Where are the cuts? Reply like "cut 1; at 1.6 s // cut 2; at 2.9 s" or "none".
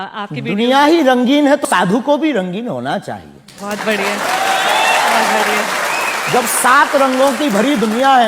cut 1; at 1.6 s